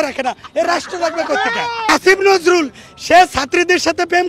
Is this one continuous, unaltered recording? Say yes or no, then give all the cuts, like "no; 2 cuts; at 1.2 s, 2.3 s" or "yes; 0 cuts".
no; 1 cut; at 1.9 s